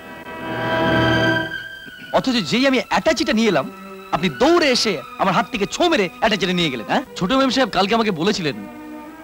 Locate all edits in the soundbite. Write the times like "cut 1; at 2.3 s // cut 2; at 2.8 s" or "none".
cut 1; at 7.1 s